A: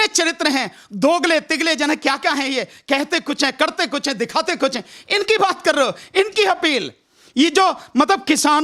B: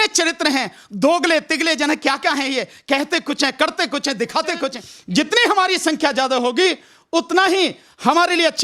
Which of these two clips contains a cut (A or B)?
B